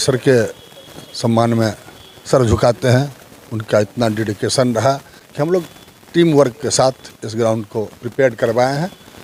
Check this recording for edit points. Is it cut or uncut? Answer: uncut